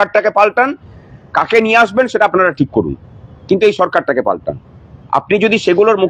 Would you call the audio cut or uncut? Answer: uncut